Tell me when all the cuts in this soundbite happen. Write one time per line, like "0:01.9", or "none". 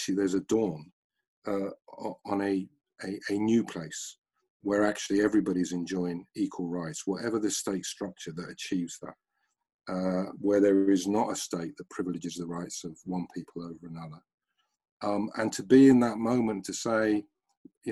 none